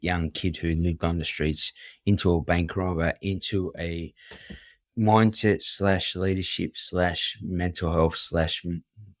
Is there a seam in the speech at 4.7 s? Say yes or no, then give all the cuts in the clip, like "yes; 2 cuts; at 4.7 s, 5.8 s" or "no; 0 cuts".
yes; 1 cut; at 4.7 s